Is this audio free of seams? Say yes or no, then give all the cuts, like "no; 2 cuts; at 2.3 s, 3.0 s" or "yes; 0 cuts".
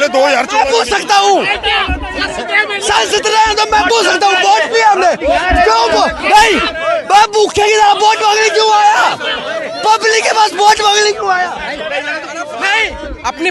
yes; 0 cuts